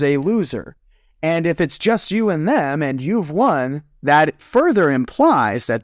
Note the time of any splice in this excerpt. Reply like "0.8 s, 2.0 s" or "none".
none